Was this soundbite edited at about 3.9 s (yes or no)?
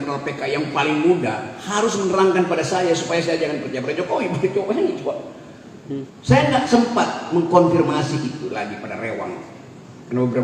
no